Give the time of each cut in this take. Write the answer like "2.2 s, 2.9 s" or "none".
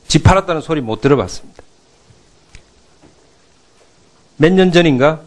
none